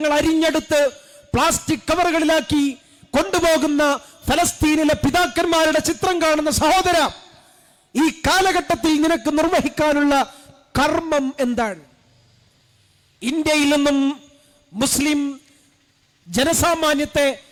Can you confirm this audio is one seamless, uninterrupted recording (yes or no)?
yes